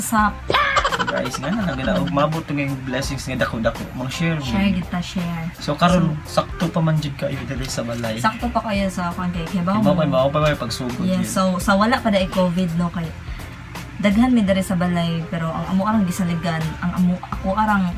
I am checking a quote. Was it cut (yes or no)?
no